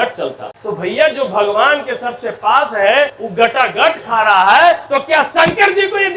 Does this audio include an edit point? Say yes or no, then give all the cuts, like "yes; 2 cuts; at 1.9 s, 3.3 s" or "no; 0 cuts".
yes; 2 cuts; at 3.2 s, 4.8 s